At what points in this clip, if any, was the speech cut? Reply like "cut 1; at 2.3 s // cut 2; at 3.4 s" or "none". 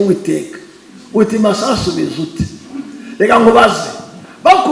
none